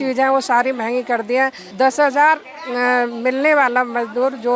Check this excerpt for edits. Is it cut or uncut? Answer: cut